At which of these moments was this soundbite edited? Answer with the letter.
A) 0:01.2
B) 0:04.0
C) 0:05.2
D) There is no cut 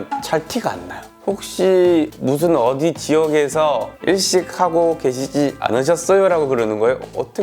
A